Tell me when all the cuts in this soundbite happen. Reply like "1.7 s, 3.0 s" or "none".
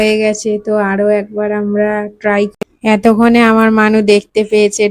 2.5 s